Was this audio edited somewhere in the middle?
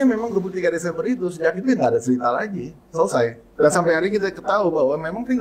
yes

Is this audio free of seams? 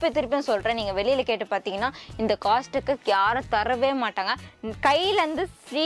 no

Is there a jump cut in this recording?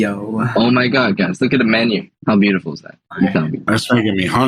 yes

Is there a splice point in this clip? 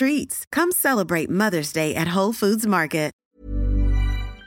yes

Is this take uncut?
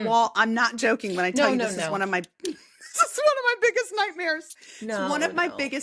yes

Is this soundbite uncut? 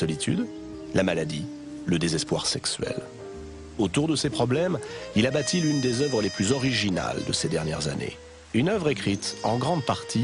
no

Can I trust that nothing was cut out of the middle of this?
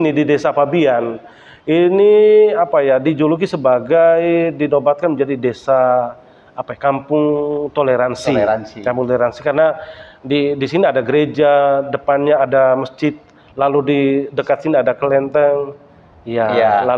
yes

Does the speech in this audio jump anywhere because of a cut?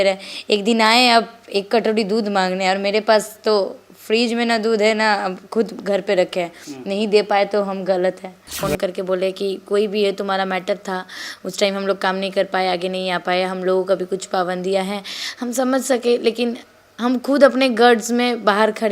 yes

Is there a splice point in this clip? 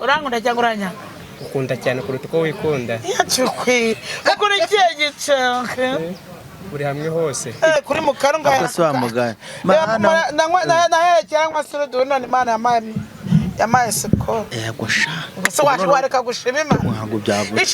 yes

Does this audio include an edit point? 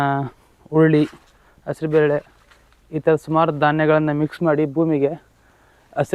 no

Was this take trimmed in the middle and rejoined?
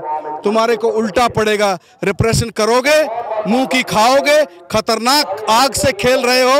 no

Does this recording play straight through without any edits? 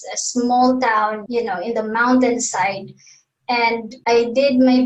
no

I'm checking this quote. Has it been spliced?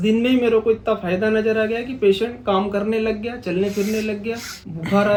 no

